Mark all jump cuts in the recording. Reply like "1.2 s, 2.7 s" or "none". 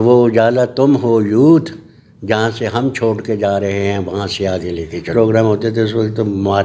5.1 s